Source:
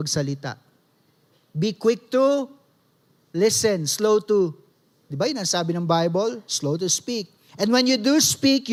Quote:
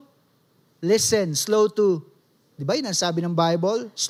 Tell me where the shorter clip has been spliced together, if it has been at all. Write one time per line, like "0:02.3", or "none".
none

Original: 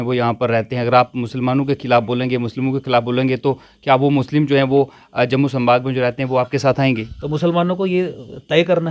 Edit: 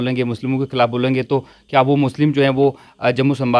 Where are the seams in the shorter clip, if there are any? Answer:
none

